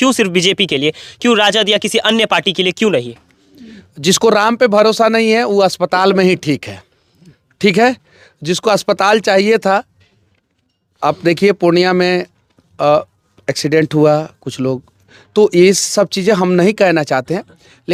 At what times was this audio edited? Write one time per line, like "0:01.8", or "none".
none